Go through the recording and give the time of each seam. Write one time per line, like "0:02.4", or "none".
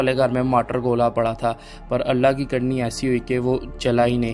none